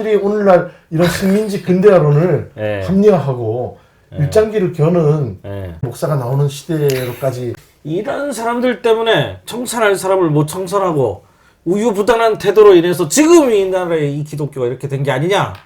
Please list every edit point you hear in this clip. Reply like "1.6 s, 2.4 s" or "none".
5.9 s, 7.5 s